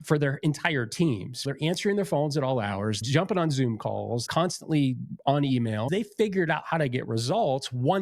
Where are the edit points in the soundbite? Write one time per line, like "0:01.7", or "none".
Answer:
0:01.4
0:03.0
0:04.3
0:05.9